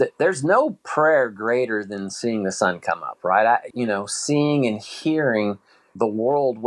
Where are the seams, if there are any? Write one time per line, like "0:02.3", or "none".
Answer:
0:03.7
0:05.9